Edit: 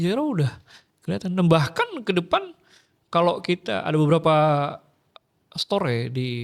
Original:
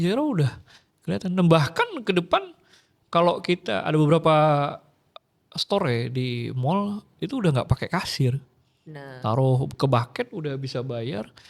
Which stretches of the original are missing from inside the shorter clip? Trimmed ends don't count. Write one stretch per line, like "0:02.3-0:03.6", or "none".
none